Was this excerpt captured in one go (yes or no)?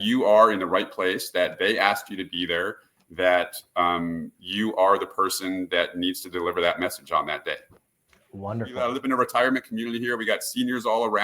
no